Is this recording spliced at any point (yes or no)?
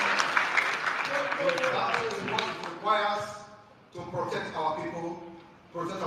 no